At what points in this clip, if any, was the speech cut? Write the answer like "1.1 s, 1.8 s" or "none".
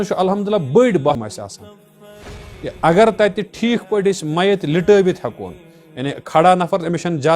1.1 s